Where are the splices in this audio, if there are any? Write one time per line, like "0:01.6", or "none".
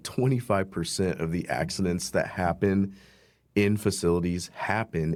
none